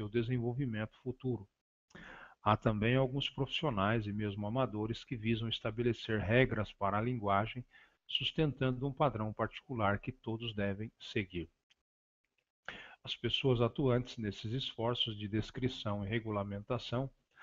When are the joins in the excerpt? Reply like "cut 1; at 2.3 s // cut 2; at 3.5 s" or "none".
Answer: cut 1; at 4.2 s